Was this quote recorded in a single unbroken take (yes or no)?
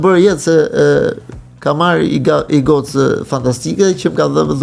yes